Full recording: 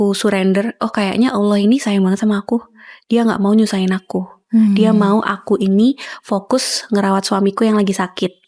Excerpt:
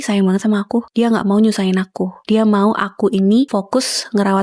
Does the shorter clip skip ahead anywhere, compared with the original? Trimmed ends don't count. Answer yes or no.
yes